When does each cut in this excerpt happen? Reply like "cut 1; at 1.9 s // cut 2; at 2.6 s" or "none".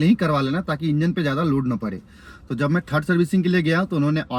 none